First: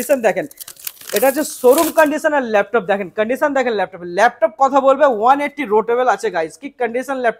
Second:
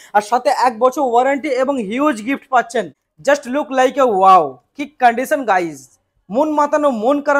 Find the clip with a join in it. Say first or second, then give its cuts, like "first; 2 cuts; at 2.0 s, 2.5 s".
second; 1 cut; at 2.9 s